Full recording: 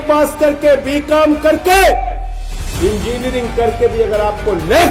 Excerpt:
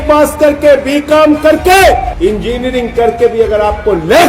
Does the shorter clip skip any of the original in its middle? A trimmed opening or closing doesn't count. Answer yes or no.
yes